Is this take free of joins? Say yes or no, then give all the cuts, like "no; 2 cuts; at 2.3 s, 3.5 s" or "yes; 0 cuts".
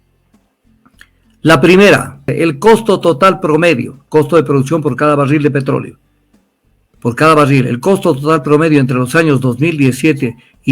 no; 1 cut; at 2.3 s